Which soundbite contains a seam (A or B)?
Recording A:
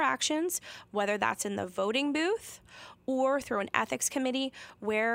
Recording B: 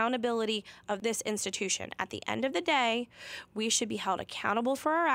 B